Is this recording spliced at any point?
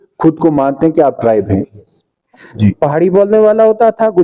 yes; 1 cut; at 2.5 s

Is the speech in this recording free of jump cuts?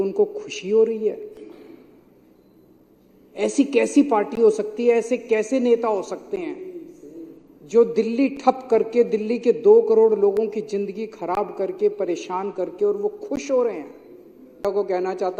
no; 1 cut; at 14.5 s

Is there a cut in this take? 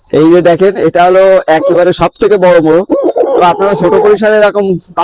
no; 0 cuts

